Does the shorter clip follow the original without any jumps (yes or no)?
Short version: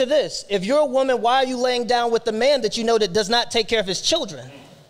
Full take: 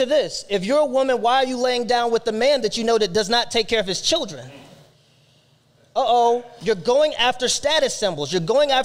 yes